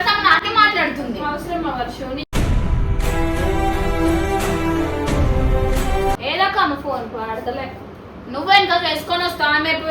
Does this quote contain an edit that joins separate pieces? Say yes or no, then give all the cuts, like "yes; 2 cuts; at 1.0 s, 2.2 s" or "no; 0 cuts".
yes; 1 cut; at 6.2 s